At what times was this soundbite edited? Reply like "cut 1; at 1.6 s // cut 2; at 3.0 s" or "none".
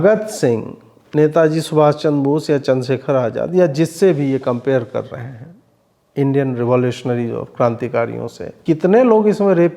cut 1; at 8.5 s